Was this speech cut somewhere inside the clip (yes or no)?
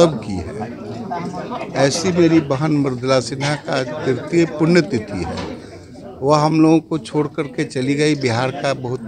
no